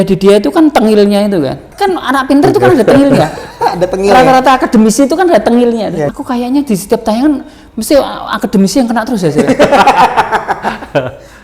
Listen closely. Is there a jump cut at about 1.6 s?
yes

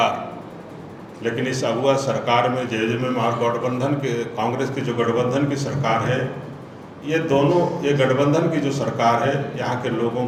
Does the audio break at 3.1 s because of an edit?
no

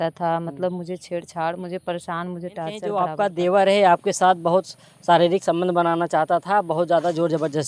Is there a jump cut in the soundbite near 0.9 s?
no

